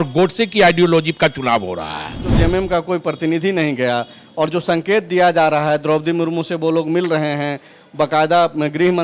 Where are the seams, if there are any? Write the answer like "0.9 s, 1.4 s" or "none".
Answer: 2.2 s